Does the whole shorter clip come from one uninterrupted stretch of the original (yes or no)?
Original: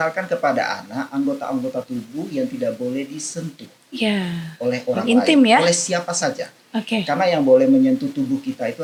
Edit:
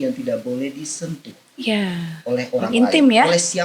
yes